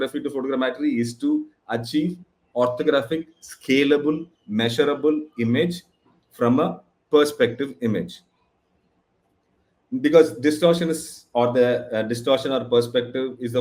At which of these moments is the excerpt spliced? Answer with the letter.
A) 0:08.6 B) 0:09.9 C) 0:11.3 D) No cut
D